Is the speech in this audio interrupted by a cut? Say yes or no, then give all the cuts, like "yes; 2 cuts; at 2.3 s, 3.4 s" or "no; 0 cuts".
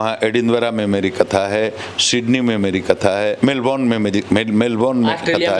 no; 0 cuts